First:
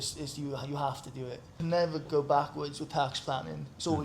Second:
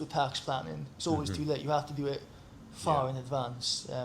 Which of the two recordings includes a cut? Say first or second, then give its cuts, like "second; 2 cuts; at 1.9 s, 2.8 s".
first; 1 cut; at 1.5 s